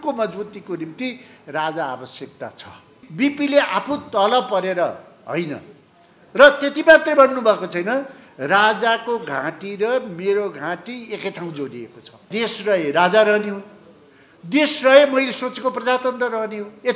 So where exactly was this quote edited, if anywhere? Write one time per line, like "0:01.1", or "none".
0:03.0
0:12.3